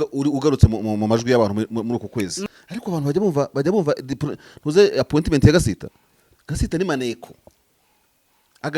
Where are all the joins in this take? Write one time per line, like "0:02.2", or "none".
0:02.4